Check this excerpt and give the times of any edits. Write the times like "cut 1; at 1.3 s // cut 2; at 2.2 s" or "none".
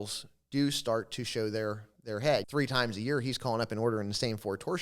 cut 1; at 2.5 s